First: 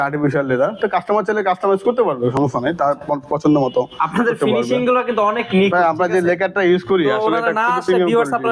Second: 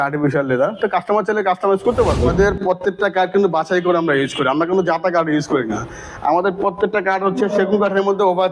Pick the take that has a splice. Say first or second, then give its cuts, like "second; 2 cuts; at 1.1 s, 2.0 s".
second; 1 cut; at 2.3 s